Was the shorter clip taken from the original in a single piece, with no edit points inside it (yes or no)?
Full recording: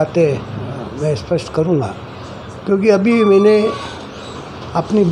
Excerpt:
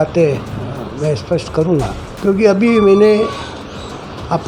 no